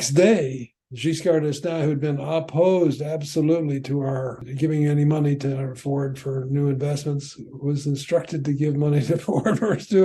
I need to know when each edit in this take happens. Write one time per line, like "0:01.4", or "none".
0:04.4

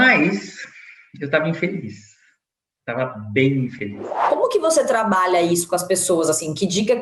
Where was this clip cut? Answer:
0:04.2

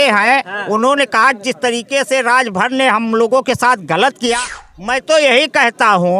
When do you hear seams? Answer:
0:04.5

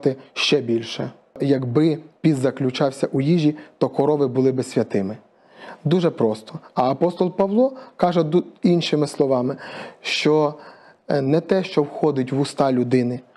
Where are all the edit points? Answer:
0:01.4

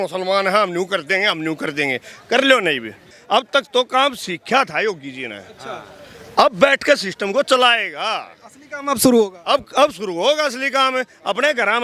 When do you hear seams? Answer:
0:03.2

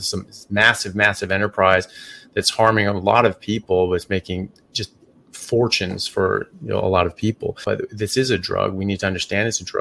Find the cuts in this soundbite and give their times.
0:07.6

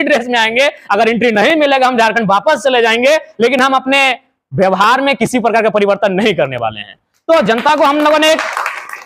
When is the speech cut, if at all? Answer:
none

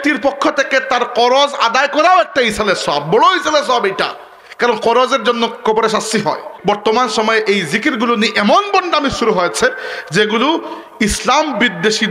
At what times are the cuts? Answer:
0:06.5

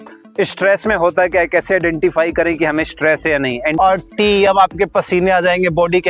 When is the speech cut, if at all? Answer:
0:03.8

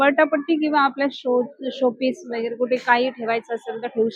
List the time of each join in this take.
none

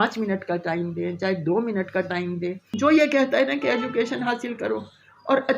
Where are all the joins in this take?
0:02.7

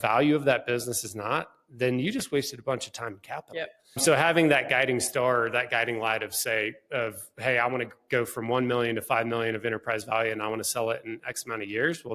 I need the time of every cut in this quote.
0:03.8

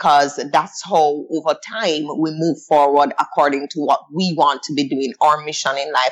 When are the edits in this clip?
none

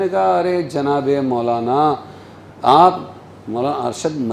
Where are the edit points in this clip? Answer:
none

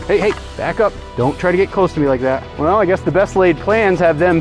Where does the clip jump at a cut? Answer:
0:02.5

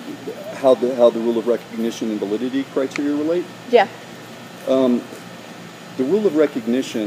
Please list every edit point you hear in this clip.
none

